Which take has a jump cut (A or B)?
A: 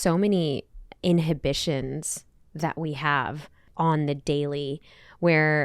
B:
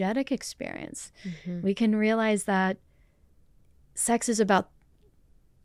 A